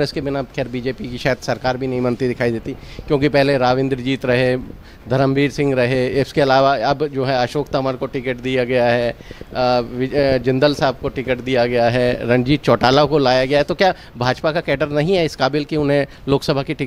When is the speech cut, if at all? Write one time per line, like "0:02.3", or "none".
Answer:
none